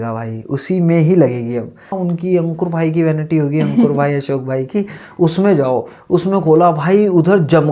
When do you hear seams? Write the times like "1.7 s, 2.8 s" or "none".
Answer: 1.9 s